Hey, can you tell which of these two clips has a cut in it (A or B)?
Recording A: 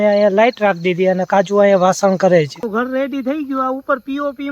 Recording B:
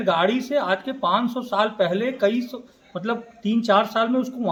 A